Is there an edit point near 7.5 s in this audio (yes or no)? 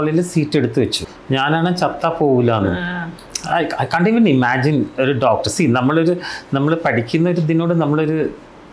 no